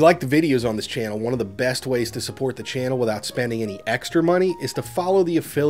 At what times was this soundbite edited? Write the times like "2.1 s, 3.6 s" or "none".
none